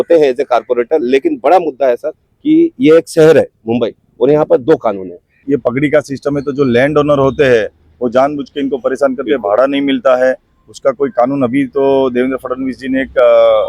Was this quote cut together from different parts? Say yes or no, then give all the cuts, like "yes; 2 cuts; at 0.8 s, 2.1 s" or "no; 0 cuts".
yes; 1 cut; at 5.4 s